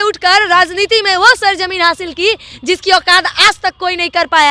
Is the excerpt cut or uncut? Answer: uncut